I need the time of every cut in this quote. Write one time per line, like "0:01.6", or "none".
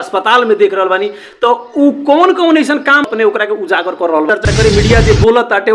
0:03.1
0:04.4